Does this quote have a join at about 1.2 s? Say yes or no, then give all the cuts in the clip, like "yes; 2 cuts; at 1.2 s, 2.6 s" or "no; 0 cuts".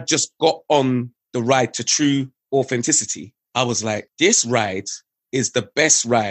yes; 2 cuts; at 1.2 s, 2.4 s